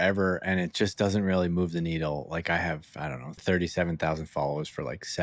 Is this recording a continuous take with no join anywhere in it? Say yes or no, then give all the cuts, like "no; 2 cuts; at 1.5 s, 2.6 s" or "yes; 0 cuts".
no; 1 cut; at 3.4 s